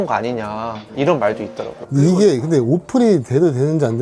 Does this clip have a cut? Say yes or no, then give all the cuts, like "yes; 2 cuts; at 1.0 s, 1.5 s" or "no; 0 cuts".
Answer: no; 0 cuts